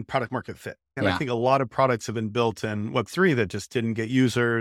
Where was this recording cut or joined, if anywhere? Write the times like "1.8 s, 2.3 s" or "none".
1.0 s